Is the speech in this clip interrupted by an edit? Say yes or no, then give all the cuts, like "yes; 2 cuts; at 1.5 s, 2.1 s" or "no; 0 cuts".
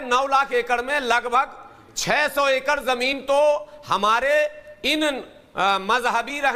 no; 0 cuts